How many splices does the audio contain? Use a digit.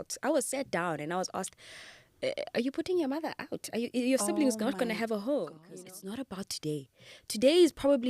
1